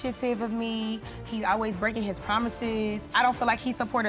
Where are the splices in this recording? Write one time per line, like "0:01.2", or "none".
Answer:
0:03.1